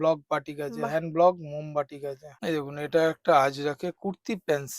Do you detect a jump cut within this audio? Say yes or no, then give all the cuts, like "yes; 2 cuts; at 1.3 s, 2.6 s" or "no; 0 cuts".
yes; 1 cut; at 2.4 s